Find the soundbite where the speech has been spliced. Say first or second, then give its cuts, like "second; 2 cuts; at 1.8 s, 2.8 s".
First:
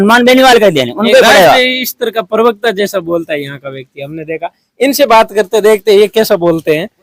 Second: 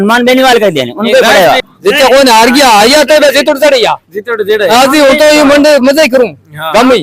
second; 1 cut; at 1.7 s